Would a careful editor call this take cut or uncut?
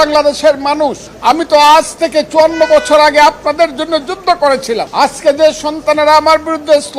cut